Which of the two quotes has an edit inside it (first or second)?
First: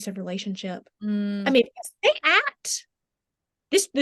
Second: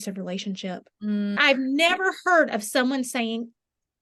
second